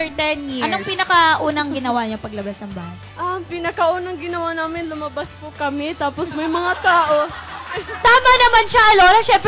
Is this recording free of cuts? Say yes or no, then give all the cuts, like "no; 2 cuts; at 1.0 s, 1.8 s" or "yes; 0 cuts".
yes; 0 cuts